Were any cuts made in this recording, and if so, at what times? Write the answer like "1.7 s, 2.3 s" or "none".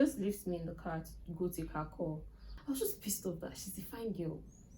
2.5 s